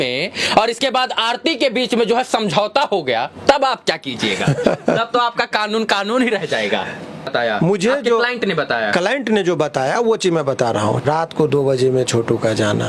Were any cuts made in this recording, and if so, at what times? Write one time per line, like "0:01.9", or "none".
0:07.3
0:11.0